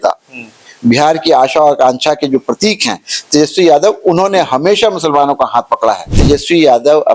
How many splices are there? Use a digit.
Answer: 1